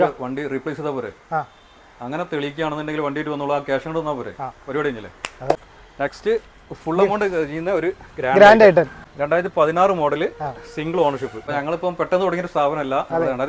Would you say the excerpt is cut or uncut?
cut